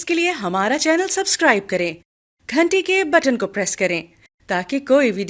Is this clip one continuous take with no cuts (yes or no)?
yes